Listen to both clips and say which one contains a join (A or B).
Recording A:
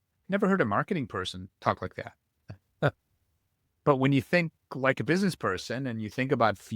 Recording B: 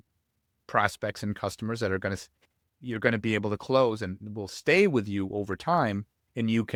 A